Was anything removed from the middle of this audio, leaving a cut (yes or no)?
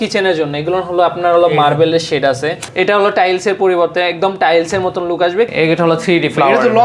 yes